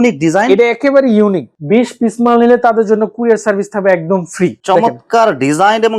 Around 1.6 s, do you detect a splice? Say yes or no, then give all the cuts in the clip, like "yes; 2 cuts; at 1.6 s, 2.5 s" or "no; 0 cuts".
yes; 2 cuts; at 1.6 s, 4.6 s